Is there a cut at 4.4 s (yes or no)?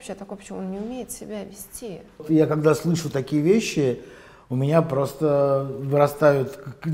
no